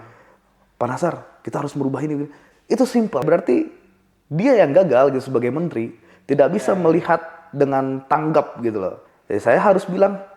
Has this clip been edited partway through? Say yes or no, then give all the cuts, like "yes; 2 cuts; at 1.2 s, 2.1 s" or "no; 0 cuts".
yes; 2 cuts; at 3.2 s, 9.1 s